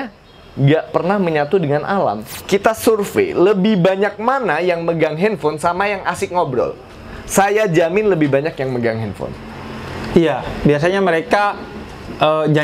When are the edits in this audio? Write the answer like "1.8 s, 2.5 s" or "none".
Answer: 2.3 s